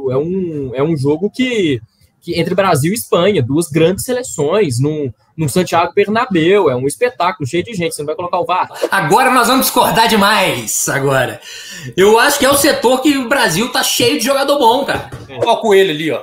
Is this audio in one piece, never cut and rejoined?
no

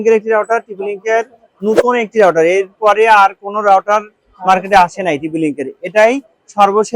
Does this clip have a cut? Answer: no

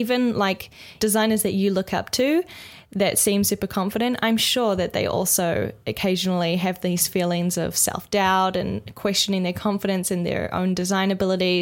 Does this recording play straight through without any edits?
no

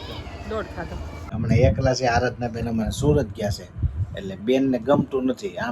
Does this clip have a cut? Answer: yes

